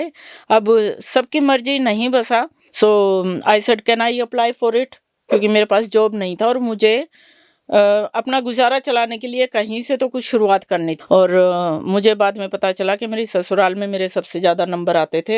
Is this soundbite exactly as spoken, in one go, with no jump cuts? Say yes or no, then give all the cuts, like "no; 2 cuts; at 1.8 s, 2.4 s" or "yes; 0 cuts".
no; 2 cuts; at 2.6 s, 10.9 s